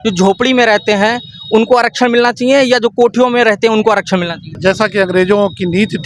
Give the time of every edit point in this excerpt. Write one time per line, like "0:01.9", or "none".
none